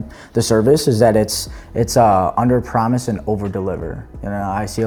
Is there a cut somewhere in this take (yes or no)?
no